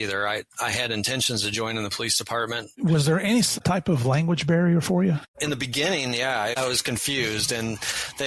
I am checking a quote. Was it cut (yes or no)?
yes